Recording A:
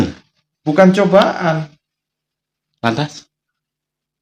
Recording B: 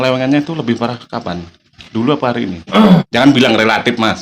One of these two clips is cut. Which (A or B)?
B